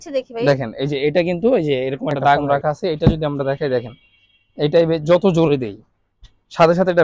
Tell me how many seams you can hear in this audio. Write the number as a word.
one